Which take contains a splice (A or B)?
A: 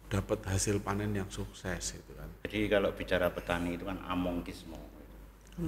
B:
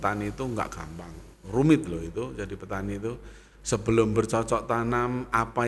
A